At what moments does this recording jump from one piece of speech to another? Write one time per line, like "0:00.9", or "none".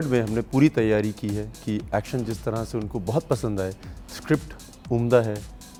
none